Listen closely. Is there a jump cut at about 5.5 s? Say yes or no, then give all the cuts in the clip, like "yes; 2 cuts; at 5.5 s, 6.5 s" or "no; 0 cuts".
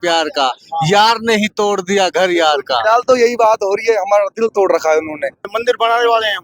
yes; 1 cut; at 5.5 s